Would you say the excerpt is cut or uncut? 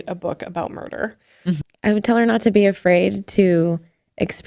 cut